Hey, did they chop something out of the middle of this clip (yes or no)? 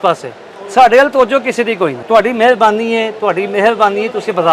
yes